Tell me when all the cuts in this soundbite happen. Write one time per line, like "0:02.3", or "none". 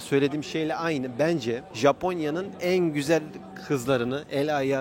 0:01.7